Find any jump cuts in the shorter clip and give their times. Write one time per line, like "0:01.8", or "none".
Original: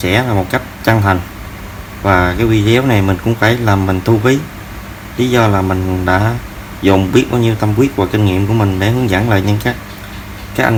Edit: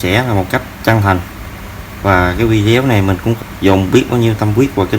0:03.4